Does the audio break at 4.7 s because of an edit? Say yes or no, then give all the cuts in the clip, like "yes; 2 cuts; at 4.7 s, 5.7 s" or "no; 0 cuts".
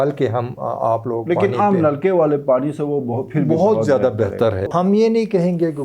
yes; 1 cut; at 4.7 s